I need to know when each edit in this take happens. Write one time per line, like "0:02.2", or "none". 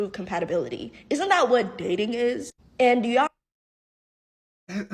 none